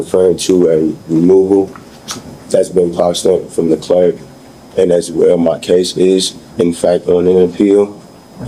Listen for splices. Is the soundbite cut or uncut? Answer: uncut